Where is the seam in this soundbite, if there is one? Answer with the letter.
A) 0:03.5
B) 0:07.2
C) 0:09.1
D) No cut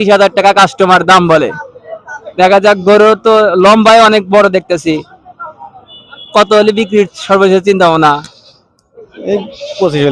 D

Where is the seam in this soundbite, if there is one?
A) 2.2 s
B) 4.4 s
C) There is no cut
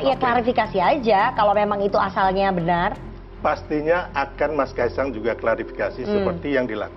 C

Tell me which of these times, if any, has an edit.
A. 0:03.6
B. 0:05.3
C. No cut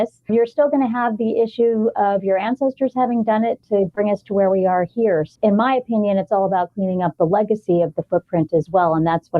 B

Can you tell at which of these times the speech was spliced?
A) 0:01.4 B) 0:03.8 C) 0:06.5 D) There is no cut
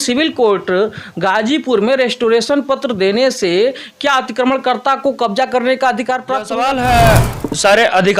C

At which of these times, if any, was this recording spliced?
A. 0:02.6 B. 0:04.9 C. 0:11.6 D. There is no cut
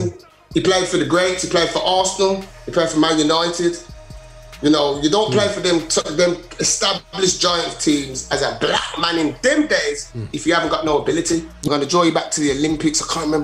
C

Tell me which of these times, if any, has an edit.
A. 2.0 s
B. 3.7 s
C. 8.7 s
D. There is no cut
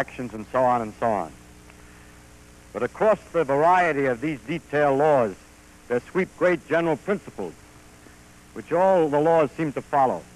C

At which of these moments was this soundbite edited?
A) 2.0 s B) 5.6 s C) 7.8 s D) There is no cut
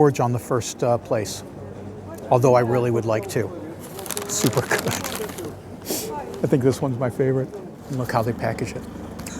C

